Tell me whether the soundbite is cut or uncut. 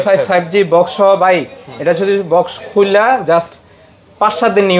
uncut